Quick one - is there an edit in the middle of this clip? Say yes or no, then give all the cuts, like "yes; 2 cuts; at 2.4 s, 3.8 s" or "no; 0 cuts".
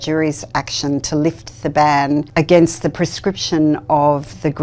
no; 0 cuts